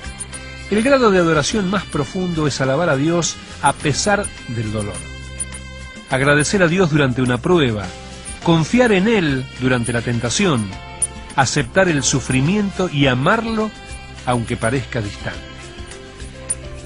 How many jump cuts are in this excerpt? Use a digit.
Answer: 0